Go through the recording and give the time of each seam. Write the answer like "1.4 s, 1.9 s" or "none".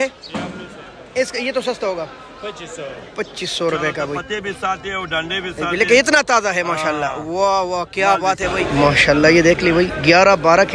4.2 s, 8.5 s